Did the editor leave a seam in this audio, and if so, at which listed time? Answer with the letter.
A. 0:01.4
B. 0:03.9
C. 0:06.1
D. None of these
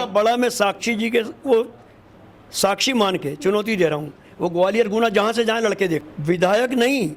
C